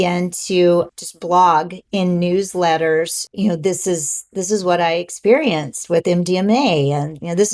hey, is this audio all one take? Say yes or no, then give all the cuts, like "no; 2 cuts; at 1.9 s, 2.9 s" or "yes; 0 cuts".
no; 2 cuts; at 1.0 s, 3.2 s